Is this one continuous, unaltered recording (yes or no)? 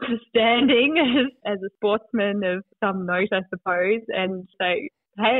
no